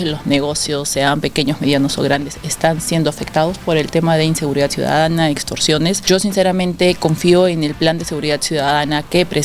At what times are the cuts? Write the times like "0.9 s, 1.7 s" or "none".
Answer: 6.0 s